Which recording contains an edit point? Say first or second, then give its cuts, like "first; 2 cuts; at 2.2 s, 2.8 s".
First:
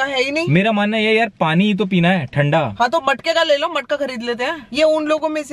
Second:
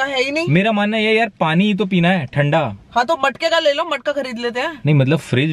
first; 2 cuts; at 2.7 s, 4.6 s